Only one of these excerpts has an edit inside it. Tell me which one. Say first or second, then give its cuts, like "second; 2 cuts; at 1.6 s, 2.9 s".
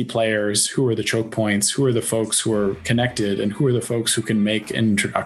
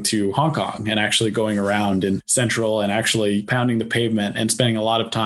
second; 2 cuts; at 2.3 s, 3.5 s